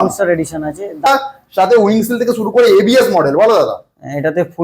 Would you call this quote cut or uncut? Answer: cut